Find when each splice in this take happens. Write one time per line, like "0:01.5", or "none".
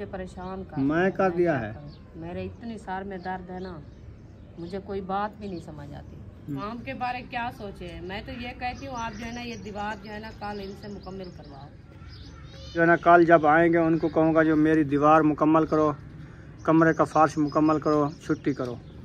0:06.6
0:12.8